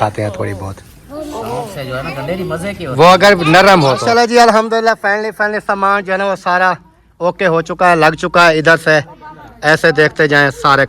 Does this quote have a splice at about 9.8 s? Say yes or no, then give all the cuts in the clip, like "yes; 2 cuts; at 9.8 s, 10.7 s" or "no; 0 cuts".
no; 1 cut; at 4.0 s